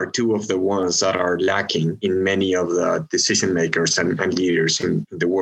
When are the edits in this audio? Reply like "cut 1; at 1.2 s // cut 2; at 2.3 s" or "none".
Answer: cut 1; at 2.0 s